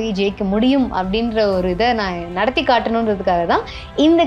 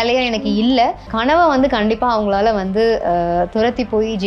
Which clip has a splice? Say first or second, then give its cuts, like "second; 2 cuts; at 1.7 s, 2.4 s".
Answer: second; 1 cut; at 1.1 s